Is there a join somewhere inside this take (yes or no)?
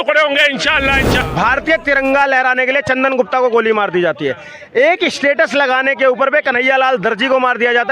yes